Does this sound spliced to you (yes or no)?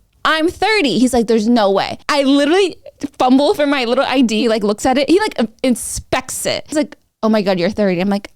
yes